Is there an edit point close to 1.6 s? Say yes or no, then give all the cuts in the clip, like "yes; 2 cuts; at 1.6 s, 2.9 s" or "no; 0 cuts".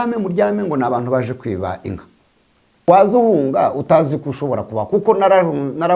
no; 1 cut; at 2.9 s